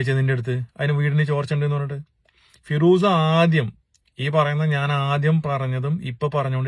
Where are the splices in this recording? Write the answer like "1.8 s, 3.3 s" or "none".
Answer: none